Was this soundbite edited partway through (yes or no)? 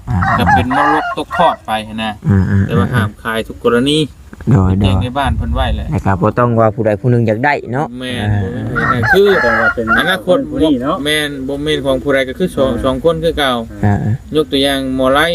no